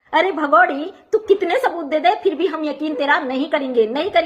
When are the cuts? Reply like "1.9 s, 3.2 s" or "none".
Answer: none